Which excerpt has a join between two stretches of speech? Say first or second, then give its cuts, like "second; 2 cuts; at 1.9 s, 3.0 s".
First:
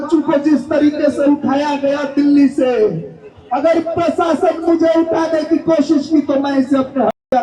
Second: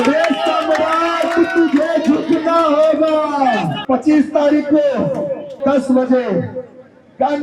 second; 2 cuts; at 3.8 s, 5.6 s